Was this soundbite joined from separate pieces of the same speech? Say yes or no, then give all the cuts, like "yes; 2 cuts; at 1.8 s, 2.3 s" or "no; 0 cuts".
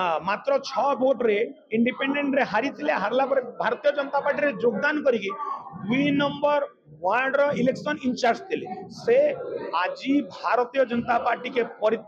no; 0 cuts